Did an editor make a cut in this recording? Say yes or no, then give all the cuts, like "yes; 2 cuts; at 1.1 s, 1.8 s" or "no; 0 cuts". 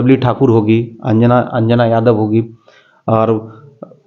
no; 0 cuts